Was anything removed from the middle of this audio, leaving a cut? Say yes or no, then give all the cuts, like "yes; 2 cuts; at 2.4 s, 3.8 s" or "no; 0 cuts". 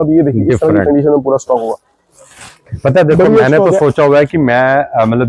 no; 0 cuts